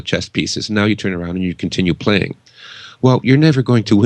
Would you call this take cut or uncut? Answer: uncut